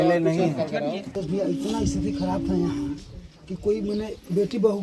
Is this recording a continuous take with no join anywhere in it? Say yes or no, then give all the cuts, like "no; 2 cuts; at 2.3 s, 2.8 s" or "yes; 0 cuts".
no; 1 cut; at 1.1 s